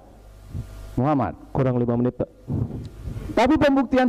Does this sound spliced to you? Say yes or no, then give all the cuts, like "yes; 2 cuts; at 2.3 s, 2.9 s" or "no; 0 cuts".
no; 0 cuts